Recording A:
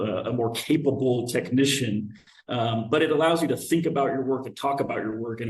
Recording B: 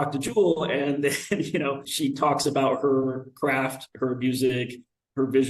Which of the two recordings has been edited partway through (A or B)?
B